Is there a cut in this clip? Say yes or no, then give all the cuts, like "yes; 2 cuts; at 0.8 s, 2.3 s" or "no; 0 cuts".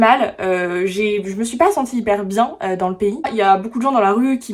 yes; 1 cut; at 3.3 s